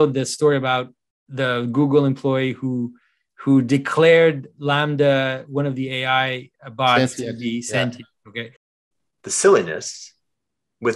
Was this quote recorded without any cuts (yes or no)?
no